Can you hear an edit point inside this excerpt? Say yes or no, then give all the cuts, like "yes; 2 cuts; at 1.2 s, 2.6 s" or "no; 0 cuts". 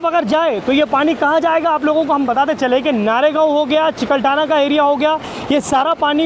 no; 0 cuts